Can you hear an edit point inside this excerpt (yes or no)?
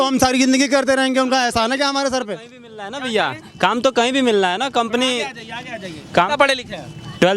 no